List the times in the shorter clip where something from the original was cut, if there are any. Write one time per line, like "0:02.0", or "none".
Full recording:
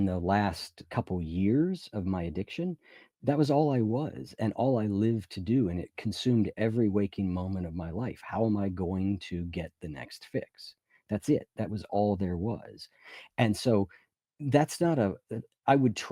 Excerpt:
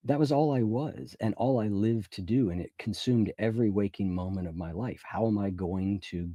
none